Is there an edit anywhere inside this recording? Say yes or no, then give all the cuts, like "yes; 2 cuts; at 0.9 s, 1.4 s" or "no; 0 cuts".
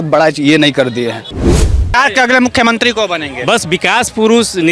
yes; 1 cut; at 1.6 s